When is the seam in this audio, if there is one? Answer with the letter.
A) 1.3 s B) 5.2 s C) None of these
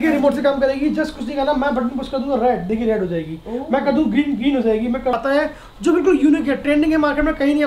B